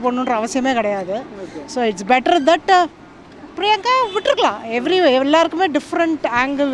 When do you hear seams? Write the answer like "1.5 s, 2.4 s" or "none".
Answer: none